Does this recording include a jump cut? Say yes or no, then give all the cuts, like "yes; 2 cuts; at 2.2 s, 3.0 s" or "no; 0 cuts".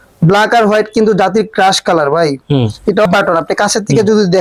yes; 1 cut; at 3.1 s